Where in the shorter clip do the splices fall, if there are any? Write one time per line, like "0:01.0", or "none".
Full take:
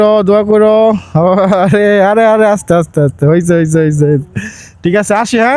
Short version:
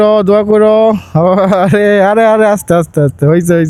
none